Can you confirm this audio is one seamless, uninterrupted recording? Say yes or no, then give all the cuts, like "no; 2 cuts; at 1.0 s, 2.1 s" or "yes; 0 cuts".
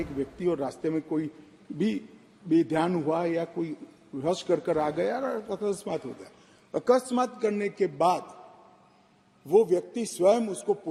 yes; 0 cuts